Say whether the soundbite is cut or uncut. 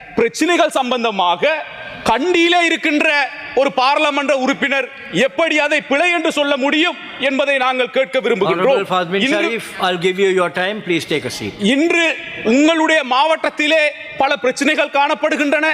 uncut